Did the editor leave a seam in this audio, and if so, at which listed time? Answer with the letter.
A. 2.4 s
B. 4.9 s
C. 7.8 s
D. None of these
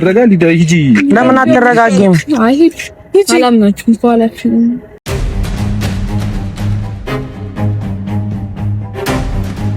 B